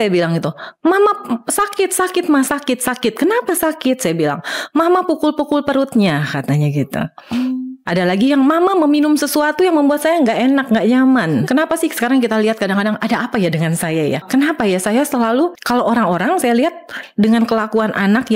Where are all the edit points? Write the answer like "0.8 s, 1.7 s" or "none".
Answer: 11.4 s, 14.2 s, 15.6 s